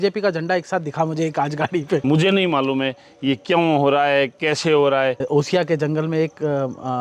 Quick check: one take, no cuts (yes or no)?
no